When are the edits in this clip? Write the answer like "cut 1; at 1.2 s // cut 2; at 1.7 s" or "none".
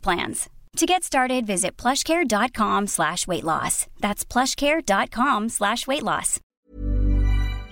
cut 1; at 6.7 s